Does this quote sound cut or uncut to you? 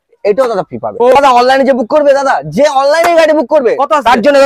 cut